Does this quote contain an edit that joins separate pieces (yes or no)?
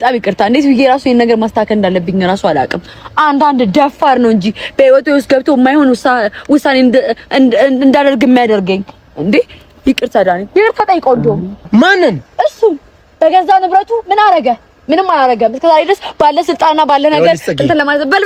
no